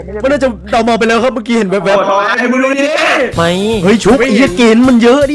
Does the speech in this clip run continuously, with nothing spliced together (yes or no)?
no